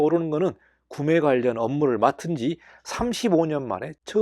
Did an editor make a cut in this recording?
no; 0 cuts

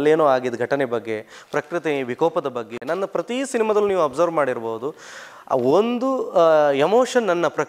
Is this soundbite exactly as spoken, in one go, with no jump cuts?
no; 1 cut; at 2.8 s

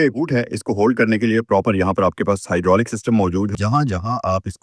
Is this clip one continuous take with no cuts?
no; 1 cut; at 3.6 s

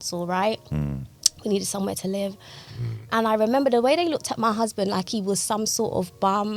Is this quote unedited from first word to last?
yes; 0 cuts

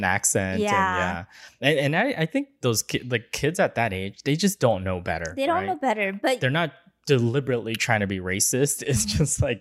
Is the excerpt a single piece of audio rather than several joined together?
yes; 0 cuts

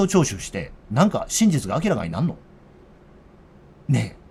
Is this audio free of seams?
yes; 0 cuts

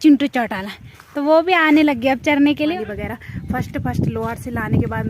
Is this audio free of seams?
no; 1 cut; at 2.7 s

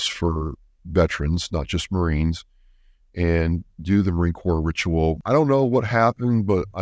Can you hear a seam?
yes; 1 cut; at 5.2 s

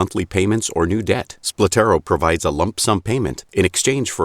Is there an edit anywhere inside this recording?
yes; 1 cut; at 3.0 s

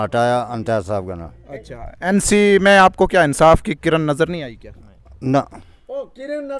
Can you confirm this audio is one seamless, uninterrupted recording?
yes; 0 cuts

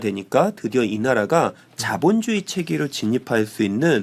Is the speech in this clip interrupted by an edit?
no; 0 cuts

